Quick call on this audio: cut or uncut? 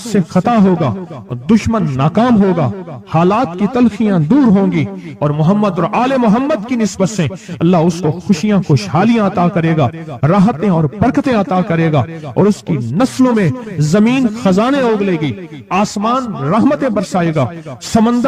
uncut